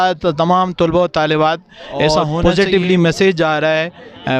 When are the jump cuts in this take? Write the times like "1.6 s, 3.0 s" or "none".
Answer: 2.3 s